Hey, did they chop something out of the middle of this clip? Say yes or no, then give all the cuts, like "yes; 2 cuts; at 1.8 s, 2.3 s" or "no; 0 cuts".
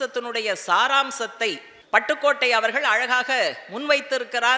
yes; 1 cut; at 1.7 s